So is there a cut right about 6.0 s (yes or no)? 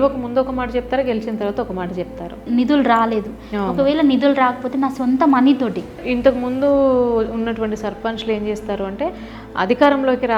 yes